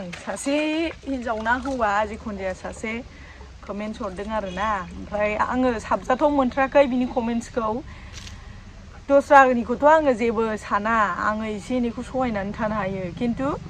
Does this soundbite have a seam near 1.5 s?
no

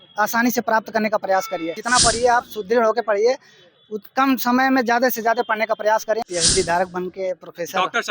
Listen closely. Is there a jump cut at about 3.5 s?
no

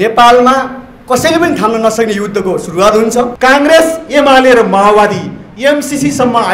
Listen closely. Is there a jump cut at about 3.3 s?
yes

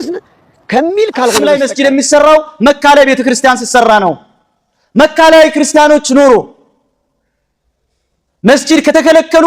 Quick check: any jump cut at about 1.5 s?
yes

